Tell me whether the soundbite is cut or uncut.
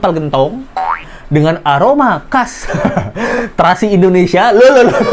uncut